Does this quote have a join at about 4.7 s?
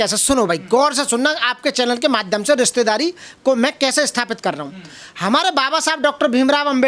no; 0 cuts

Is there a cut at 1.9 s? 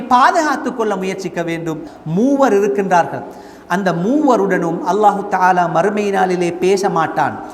yes; 1 cut; at 1.9 s

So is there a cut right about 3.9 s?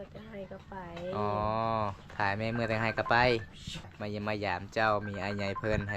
yes; 1 cut; at 3.9 s

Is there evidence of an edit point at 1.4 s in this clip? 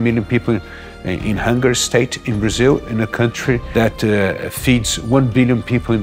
no; 1 cut; at 3.7 s

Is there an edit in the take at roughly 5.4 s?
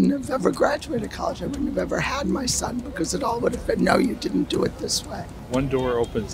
yes; 1 cut; at 5.4 s

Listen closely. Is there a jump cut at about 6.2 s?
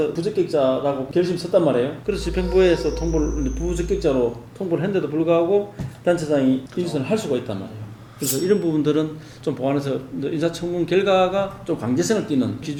no; 0 cuts

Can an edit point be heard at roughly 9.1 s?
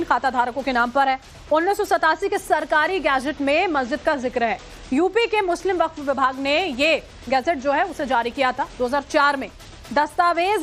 no; 0 cuts

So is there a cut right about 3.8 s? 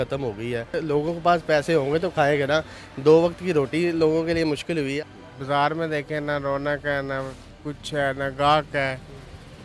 no; 2 cuts; at 0.8 s, 5.0 s

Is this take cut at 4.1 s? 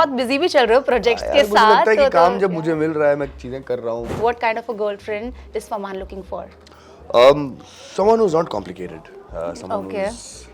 yes; 1 cut; at 4.1 s

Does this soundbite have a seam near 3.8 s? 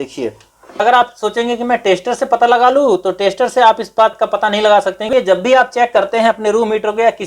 no; 2 cuts; at 0.8 s, 5.1 s

